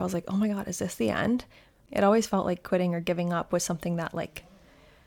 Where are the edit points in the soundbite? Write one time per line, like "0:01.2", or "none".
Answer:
0:01.8